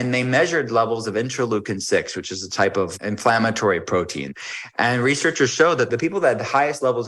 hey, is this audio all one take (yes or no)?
no